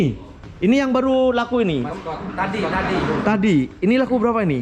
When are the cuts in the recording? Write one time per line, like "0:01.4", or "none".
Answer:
none

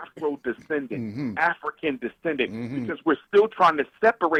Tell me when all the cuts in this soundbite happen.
none

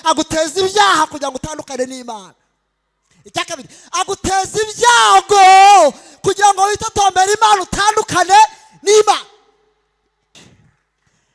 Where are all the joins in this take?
0:10.3

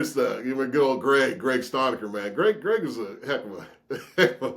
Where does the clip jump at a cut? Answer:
none

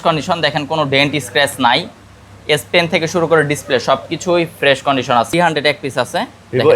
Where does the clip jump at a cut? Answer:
0:05.3

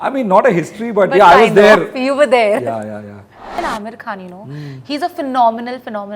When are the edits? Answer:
0:03.5

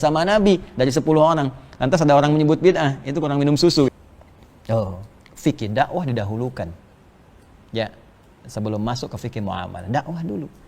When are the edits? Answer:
0:03.9

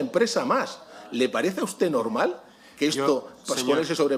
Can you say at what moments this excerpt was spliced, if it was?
none

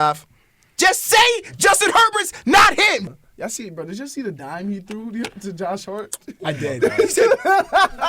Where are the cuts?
0:03.1

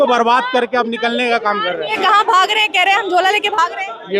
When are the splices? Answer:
0:02.0

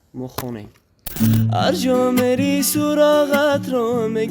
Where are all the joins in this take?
0:01.1

